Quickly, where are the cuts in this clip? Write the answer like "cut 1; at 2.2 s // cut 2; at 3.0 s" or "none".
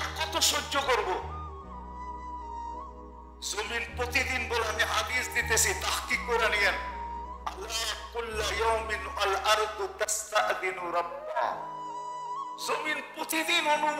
cut 1; at 1.9 s // cut 2; at 3.2 s